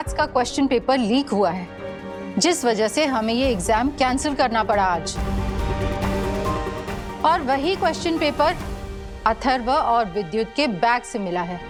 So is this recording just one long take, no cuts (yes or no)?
yes